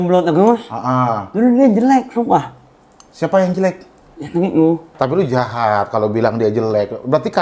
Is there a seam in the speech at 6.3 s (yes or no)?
no